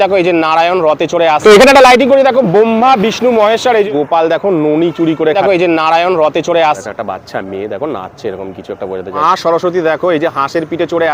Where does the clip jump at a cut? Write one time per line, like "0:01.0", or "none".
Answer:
0:01.4
0:03.9
0:05.3
0:06.8
0:09.2